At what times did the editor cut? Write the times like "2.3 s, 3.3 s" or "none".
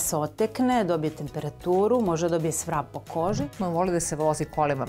3.6 s